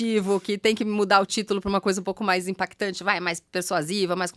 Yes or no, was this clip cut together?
no